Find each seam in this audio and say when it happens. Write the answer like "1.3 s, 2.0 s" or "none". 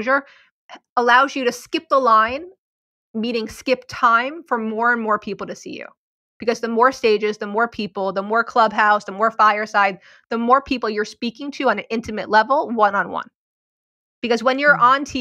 none